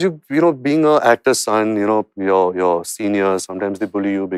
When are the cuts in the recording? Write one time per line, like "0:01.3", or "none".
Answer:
none